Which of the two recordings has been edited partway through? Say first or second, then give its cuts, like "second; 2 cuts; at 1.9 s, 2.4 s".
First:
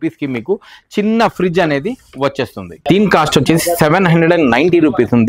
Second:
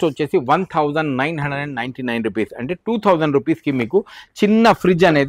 first; 1 cut; at 2.8 s